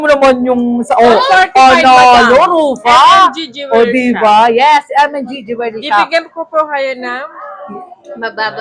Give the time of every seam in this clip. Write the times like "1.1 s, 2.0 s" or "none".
none

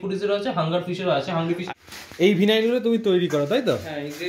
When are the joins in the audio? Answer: 1.6 s

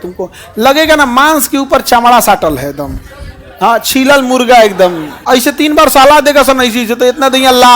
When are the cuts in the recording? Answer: 5.1 s

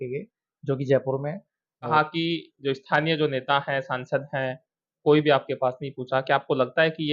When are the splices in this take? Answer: 1.9 s

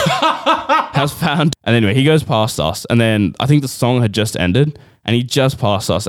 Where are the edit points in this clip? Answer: 1.5 s

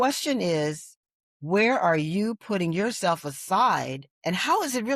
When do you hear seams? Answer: 4.0 s

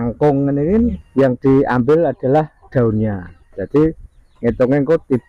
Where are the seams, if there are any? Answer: 1.0 s

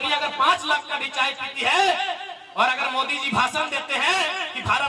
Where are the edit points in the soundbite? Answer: none

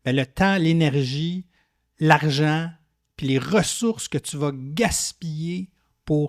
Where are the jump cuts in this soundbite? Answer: none

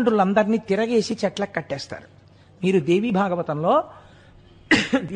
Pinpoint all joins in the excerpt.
none

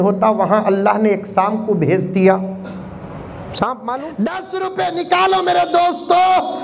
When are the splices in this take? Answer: 4.1 s

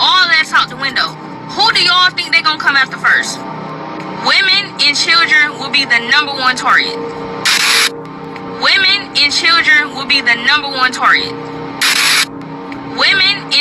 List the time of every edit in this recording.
11.9 s

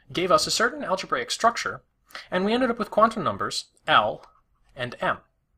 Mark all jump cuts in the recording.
none

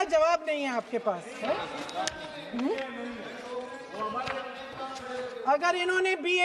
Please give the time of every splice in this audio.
none

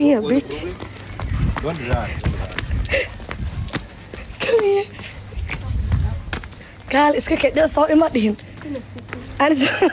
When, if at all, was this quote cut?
none

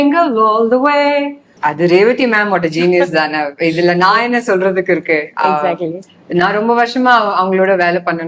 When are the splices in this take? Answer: 1.4 s

